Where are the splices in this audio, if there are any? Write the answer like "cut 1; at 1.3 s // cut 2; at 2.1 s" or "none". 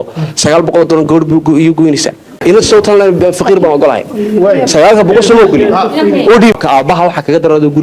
cut 1; at 2.4 s // cut 2; at 6.5 s